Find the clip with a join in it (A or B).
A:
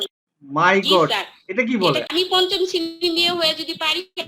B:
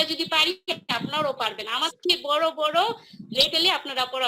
A